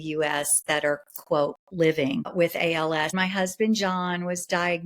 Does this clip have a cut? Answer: yes; 2 cuts; at 2.3 s, 3.1 s

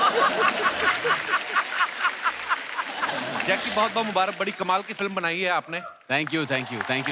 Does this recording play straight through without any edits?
no; 1 cut; at 3.2 s

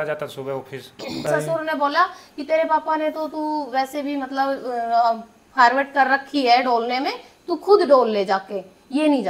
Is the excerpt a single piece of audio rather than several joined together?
no; 1 cut; at 1.3 s

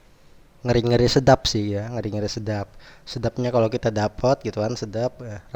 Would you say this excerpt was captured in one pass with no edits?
yes; 0 cuts

